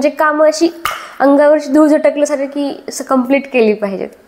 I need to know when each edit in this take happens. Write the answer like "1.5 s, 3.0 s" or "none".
none